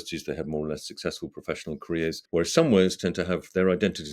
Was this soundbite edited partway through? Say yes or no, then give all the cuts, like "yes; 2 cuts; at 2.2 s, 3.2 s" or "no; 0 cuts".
yes; 1 cut; at 2.2 s